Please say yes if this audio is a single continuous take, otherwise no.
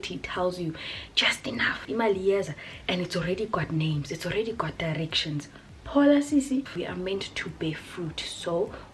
no